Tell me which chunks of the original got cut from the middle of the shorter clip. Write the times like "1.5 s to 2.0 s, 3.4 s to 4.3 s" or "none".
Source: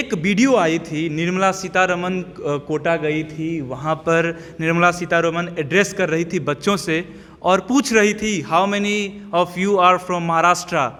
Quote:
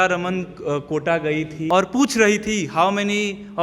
3.4 s to 7.4 s